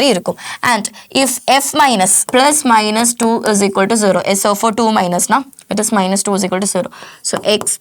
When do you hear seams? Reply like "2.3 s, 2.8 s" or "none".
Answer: 2.2 s